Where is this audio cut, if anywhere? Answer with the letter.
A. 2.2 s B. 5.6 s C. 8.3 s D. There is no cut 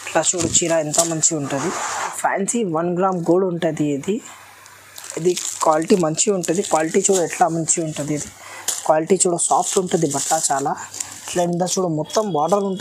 A